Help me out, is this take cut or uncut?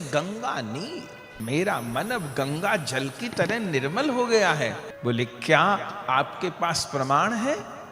cut